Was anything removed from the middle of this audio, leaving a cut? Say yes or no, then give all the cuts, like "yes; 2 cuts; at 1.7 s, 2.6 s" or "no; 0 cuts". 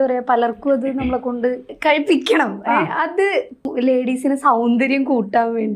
yes; 2 cuts; at 1.7 s, 3.7 s